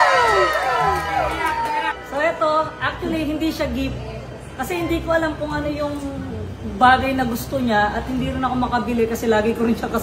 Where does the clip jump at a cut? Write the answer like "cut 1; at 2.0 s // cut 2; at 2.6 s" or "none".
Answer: cut 1; at 2.0 s